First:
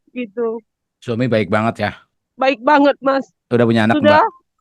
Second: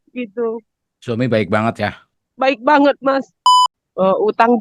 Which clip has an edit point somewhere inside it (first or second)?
second